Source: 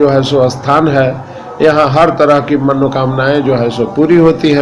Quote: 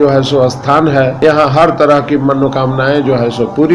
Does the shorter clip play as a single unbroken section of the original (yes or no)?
no